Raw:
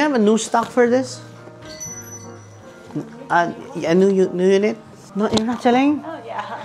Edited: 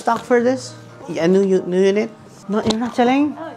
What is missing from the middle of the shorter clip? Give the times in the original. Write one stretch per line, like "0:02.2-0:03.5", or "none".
0:01.5-0:03.7